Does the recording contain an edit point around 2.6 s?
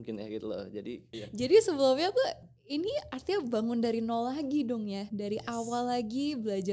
no; 1 cut; at 1.2 s

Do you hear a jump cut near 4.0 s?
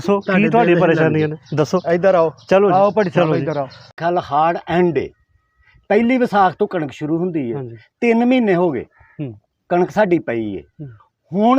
yes; 1 cut; at 4.0 s

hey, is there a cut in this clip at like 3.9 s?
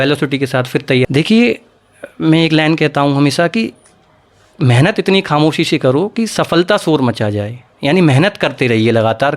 no; 1 cut; at 1.0 s

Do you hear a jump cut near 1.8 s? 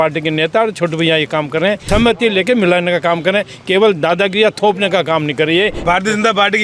yes; 2 cuts; at 1.8 s, 5.8 s

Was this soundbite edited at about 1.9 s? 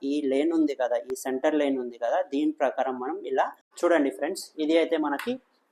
no; 1 cut; at 3.6 s

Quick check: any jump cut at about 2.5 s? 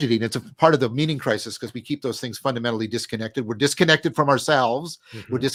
no; 0 cuts

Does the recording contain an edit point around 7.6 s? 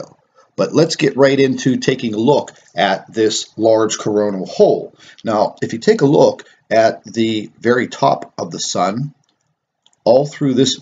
no; 1 cut; at 3.2 s

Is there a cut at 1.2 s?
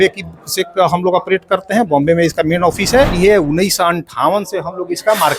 no; 1 cut; at 3.1 s

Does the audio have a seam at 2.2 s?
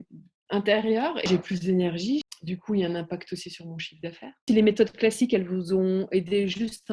yes; 3 cuts; at 1.2 s, 2.2 s, 4.4 s

